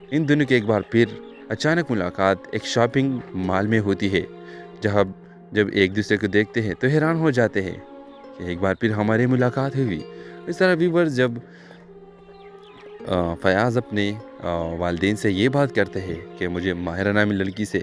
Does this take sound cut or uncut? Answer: cut